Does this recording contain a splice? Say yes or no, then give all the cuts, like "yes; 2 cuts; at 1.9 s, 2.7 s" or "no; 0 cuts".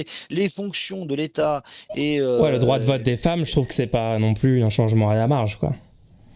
no; 0 cuts